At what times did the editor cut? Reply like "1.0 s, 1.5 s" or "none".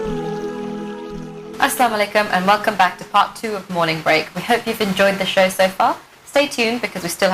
1.4 s